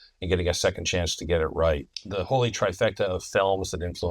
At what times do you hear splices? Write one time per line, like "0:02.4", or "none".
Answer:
0:01.9